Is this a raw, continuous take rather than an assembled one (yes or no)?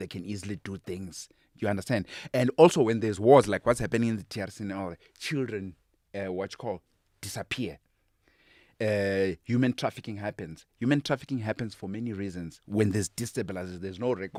yes